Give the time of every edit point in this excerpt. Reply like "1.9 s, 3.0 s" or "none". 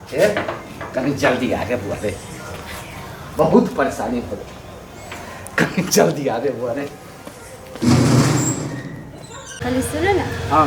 9.5 s